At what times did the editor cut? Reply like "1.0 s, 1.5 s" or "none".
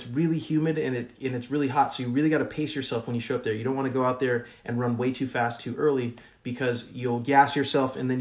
none